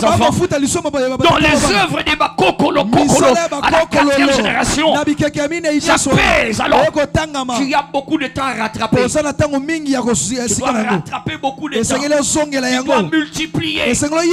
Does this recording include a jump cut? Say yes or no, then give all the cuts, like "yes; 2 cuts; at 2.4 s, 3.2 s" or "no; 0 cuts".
no; 0 cuts